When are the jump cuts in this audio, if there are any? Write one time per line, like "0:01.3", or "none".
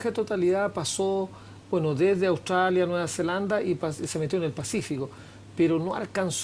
0:05.3